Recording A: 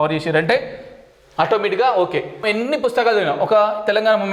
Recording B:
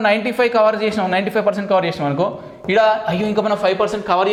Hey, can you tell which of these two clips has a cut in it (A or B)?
A